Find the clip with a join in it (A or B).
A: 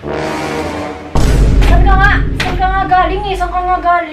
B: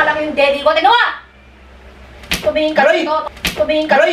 B